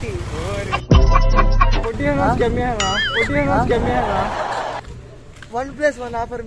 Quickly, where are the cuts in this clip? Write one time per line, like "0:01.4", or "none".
0:01.8

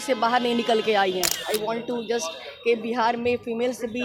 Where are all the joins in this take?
0:01.4

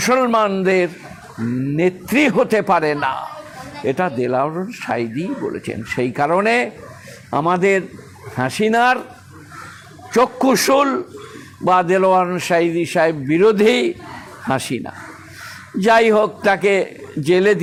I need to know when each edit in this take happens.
none

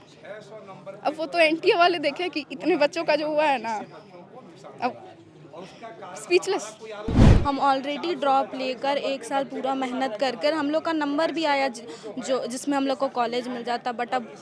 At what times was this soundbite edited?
0:07.3

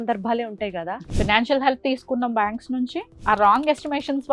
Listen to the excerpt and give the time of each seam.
0:01.0
0:03.1

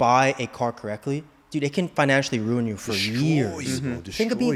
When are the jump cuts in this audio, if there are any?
none

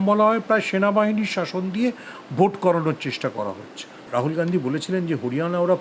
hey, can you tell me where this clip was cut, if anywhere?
0:04.0

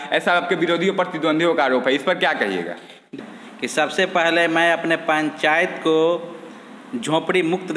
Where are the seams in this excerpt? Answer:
0:03.2

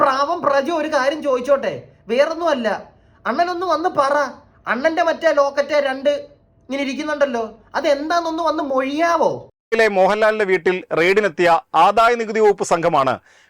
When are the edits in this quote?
0:09.7

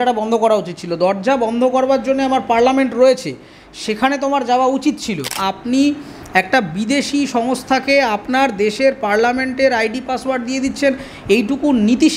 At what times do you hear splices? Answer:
0:05.4

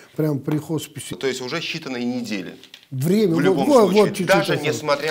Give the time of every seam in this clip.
0:01.1

